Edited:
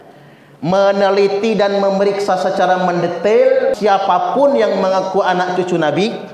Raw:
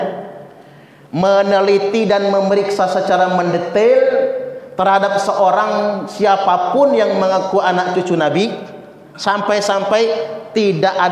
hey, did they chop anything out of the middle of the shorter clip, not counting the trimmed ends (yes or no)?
yes